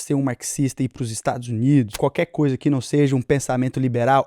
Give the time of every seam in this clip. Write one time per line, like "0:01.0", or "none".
0:01.9